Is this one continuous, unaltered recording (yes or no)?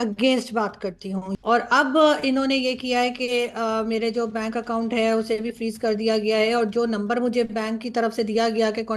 no